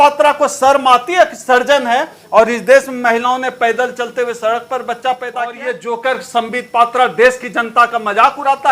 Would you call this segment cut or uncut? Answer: cut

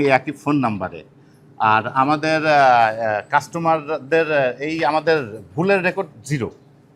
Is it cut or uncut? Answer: uncut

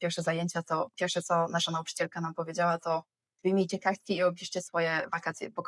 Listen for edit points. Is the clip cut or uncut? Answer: uncut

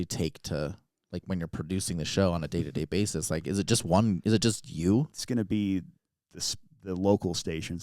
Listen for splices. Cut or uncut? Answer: cut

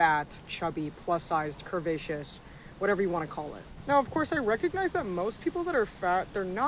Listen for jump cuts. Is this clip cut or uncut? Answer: cut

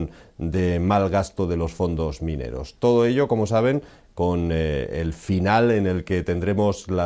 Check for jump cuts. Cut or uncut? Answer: cut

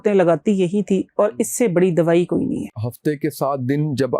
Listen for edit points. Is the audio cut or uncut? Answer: cut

